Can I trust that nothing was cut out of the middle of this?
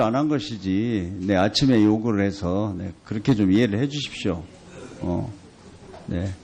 yes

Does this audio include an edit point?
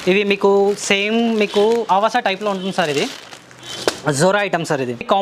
no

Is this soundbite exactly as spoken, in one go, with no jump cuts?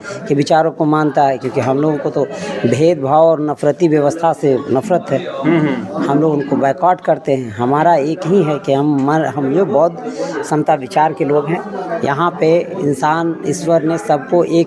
yes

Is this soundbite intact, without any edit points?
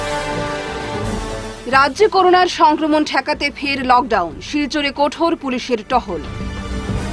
yes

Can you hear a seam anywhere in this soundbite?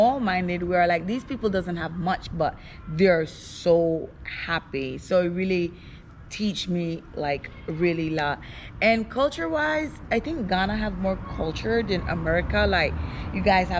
no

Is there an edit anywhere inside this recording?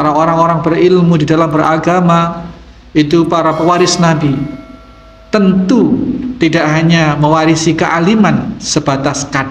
no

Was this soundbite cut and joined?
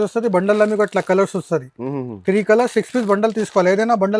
no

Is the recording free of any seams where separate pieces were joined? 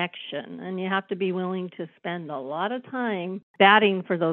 no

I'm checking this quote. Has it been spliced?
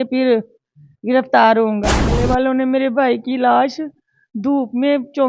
yes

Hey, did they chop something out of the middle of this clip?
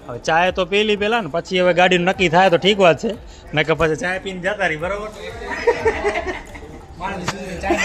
no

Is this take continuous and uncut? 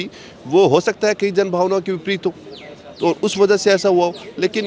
yes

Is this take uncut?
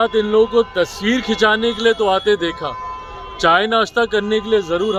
yes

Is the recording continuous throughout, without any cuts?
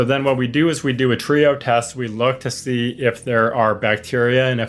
yes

